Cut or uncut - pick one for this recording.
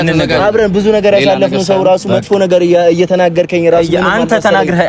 uncut